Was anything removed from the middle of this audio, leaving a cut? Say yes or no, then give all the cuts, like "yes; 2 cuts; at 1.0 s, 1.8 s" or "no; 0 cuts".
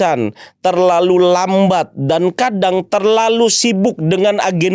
no; 0 cuts